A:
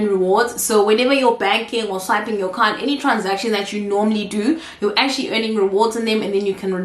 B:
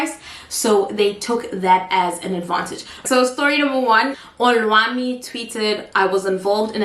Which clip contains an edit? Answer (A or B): B